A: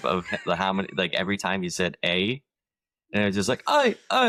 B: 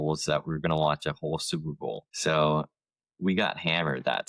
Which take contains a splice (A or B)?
B